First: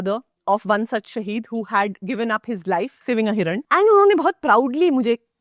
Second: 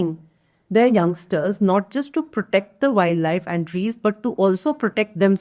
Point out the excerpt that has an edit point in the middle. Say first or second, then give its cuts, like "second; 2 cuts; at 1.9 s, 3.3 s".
first; 1 cut; at 3.0 s